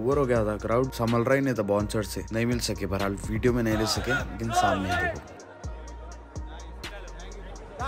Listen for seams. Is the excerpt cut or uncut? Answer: uncut